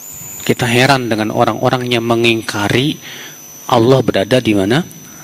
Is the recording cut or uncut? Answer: uncut